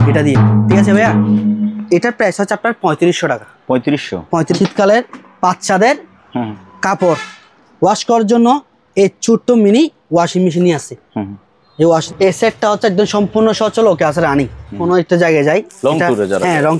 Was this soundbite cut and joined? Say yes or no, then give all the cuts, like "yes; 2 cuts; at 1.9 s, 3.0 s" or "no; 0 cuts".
yes; 3 cuts; at 4.5 s, 12.0 s, 14.8 s